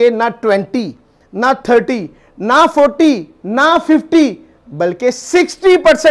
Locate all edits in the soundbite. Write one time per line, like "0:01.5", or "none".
none